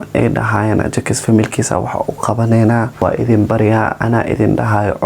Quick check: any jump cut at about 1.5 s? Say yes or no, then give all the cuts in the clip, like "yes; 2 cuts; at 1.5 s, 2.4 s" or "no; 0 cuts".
no; 1 cut; at 2.9 s